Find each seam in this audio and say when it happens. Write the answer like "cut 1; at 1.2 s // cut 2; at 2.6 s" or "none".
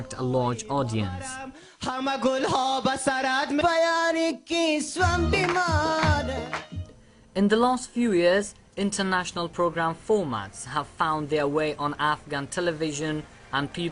cut 1; at 1.6 s